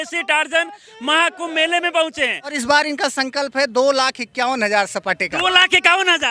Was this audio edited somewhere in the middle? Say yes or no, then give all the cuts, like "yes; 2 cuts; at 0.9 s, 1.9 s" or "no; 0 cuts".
yes; 1 cut; at 2.6 s